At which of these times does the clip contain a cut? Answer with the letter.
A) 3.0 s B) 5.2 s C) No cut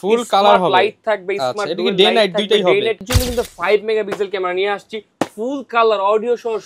A